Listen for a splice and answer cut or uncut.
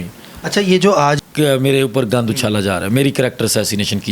cut